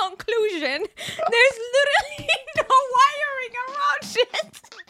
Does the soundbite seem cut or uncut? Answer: uncut